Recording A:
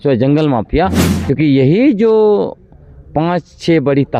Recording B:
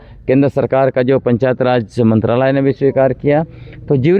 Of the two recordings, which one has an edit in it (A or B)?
A